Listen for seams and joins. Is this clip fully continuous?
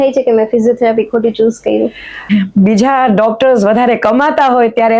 no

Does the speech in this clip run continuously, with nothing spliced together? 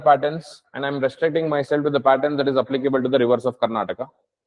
yes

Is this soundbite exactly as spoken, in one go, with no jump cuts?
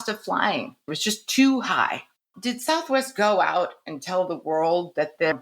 no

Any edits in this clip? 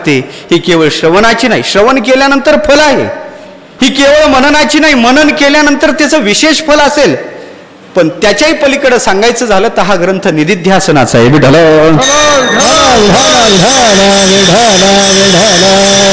no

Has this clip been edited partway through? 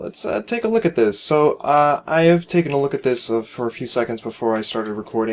yes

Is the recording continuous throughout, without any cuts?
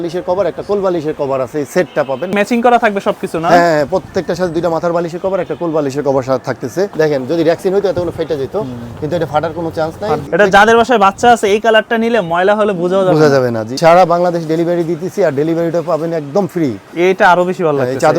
no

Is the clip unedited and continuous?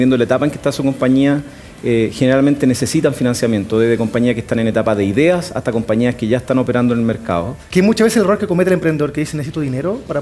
no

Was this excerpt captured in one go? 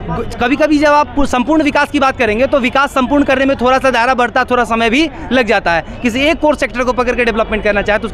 yes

